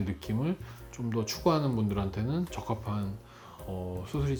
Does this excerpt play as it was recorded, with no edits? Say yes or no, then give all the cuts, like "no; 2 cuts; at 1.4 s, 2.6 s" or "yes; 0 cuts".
yes; 0 cuts